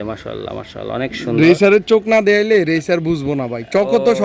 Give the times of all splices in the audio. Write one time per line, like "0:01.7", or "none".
none